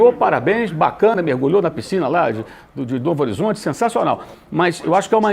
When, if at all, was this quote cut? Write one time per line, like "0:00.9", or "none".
none